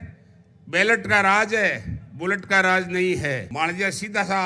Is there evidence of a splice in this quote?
yes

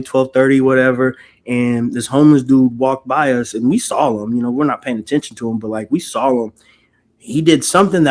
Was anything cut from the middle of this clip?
no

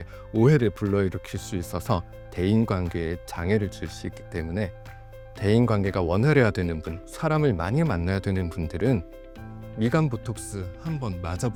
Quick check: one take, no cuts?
yes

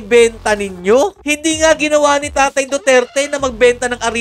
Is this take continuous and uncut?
no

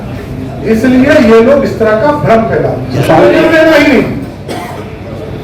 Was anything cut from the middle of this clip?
yes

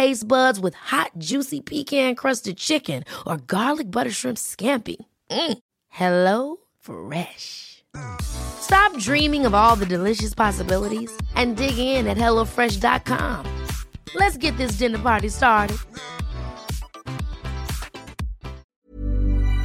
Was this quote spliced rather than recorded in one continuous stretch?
yes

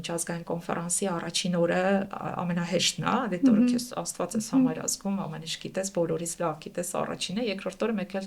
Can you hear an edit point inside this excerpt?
no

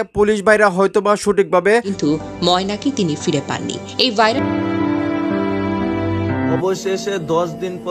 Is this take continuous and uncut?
no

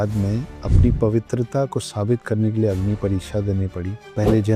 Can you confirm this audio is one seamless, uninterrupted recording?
yes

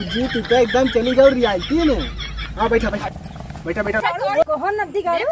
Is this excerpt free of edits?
no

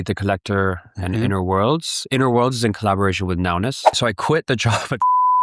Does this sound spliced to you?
yes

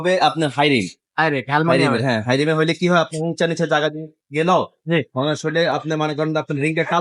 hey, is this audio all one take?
yes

